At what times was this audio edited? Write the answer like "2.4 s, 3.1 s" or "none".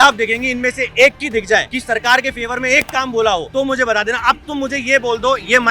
1.7 s, 3.5 s